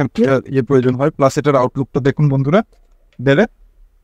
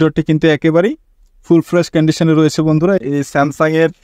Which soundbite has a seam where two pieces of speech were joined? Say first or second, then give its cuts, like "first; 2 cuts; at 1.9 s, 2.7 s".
second; 1 cut; at 3.0 s